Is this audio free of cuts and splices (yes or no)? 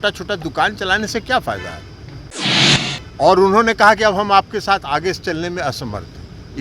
no